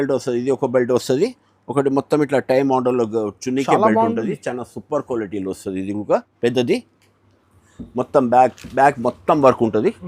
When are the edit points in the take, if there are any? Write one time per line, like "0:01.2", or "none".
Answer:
0:06.3